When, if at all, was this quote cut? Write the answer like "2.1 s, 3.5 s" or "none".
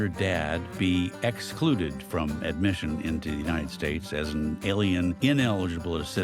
5.2 s

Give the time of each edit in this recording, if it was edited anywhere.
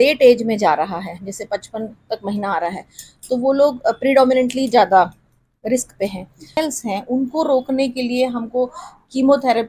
6.6 s

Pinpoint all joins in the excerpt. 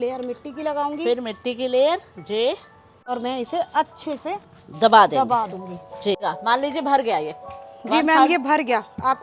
3.1 s, 6.2 s

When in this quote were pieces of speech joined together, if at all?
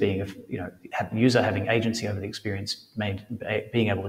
none

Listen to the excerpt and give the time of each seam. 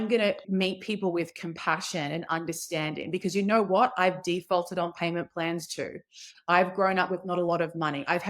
6.3 s

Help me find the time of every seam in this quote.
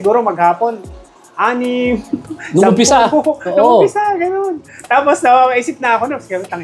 none

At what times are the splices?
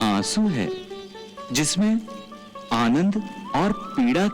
none

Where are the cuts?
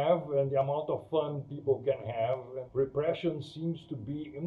2.6 s

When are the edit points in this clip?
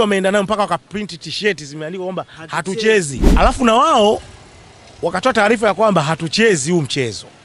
3.2 s

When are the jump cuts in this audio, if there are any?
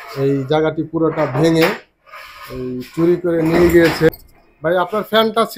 4.1 s

